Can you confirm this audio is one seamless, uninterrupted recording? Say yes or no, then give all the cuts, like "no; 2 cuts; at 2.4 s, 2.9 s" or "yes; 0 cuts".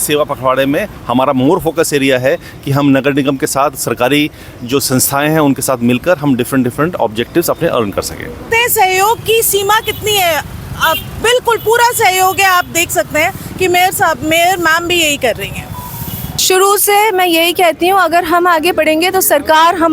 no; 2 cuts; at 8.5 s, 16.4 s